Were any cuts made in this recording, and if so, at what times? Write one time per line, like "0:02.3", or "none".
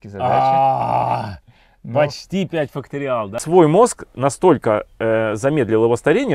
0:03.4